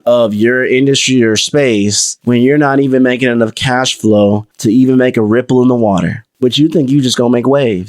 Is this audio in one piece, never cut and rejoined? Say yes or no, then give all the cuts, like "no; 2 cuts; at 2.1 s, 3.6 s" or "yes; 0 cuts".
no; 1 cut; at 4.5 s